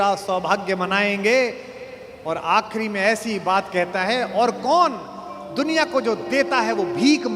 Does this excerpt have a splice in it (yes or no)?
no